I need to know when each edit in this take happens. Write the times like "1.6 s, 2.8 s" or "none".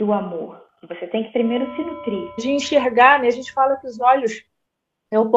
2.4 s